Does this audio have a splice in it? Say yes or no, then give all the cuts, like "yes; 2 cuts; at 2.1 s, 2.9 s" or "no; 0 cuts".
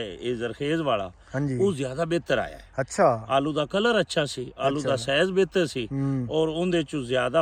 no; 0 cuts